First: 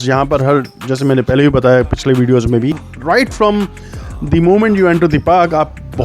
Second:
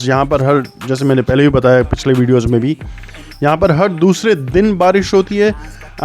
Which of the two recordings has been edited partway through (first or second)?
first